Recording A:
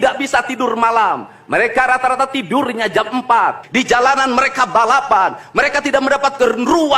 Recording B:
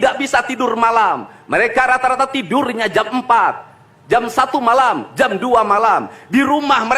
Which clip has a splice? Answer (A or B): A